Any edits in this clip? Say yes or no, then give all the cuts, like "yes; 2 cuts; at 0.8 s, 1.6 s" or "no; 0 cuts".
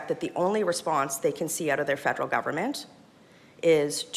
no; 0 cuts